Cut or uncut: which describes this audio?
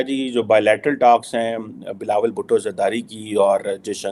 uncut